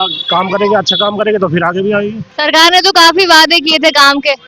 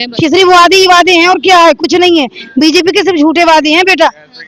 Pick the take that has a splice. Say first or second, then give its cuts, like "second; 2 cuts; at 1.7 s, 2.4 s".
first; 1 cut; at 2.2 s